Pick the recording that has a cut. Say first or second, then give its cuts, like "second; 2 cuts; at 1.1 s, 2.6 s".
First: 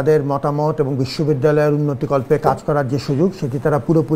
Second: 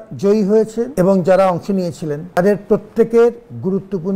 second; 2 cuts; at 0.9 s, 2.4 s